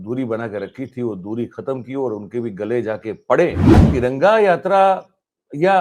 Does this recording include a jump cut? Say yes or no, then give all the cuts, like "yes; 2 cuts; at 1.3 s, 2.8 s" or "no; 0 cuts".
yes; 1 cut; at 3.8 s